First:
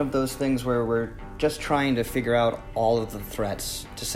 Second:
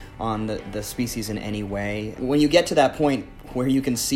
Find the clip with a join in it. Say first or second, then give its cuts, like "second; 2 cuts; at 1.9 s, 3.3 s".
second; 1 cut; at 2.2 s